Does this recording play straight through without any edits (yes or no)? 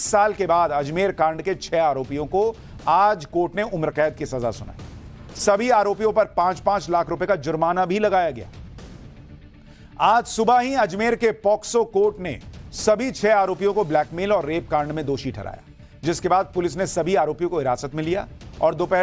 yes